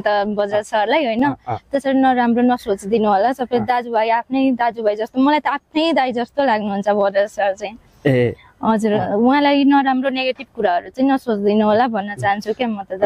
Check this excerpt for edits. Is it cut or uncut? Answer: uncut